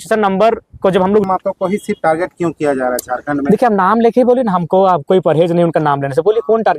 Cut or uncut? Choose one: cut